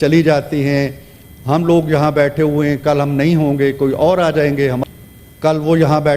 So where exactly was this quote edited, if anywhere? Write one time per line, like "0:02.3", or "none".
0:04.8